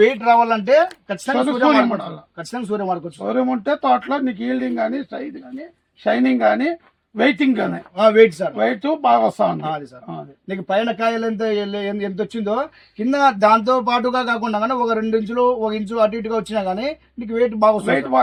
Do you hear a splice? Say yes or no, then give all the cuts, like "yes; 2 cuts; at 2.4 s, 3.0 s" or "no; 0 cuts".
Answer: no; 0 cuts